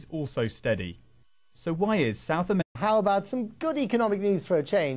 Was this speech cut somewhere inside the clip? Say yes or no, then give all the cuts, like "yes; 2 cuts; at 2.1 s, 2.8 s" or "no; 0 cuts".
no; 0 cuts